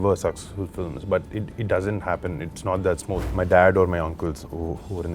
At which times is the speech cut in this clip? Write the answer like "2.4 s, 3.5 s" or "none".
3.3 s